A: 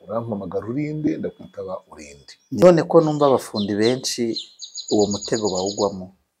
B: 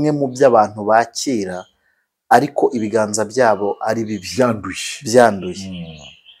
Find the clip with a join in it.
A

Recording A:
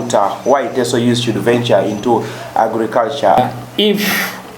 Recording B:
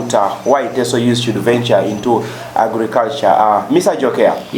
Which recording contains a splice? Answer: A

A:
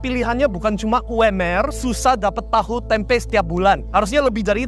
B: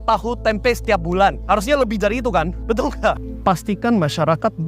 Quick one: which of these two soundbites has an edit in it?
B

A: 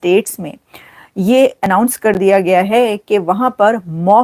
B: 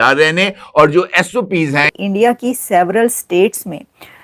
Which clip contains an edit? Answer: B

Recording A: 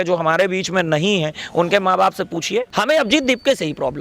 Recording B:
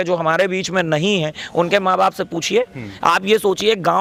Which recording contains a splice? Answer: A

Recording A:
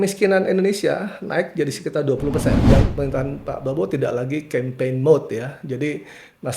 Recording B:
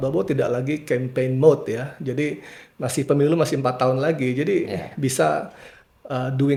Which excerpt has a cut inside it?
A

